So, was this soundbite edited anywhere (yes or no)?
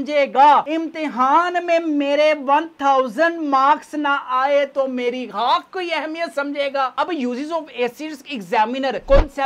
yes